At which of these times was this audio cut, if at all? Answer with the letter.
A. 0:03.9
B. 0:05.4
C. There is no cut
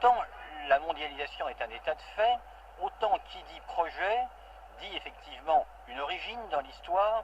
A